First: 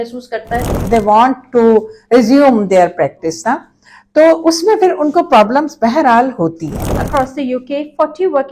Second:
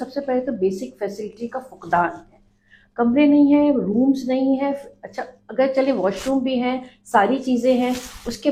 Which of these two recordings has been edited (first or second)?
first